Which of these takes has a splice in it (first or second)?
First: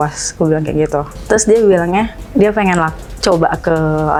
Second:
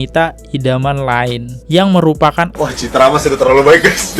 second